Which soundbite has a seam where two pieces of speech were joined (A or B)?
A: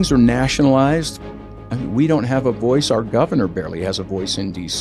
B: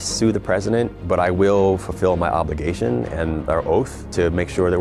B